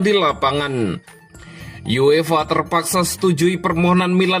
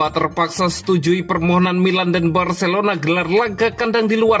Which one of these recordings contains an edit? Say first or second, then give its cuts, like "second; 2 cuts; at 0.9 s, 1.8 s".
first; 1 cut; at 1.1 s